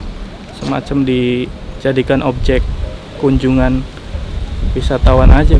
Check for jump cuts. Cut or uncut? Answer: uncut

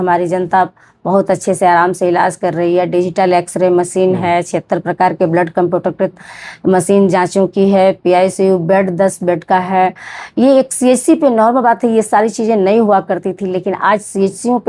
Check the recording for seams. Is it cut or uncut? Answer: uncut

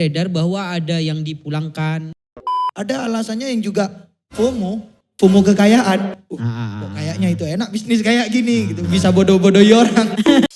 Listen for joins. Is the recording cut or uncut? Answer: cut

